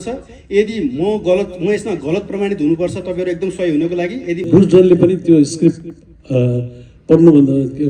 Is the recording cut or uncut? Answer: cut